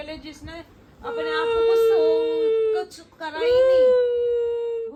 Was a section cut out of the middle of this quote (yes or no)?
no